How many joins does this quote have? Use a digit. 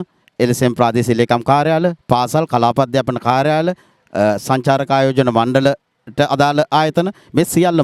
0